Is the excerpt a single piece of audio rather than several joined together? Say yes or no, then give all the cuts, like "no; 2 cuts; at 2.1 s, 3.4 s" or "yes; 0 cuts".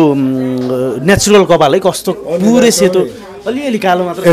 yes; 0 cuts